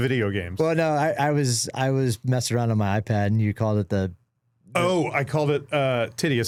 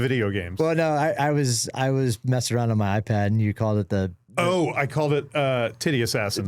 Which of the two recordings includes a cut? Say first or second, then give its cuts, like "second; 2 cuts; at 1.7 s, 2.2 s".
second; 1 cut; at 4.2 s